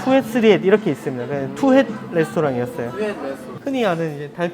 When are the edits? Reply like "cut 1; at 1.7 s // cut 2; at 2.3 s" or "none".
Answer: cut 1; at 3.5 s